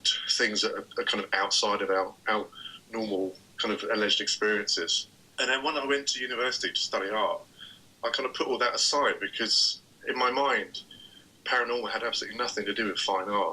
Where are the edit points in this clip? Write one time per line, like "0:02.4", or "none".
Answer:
0:05.1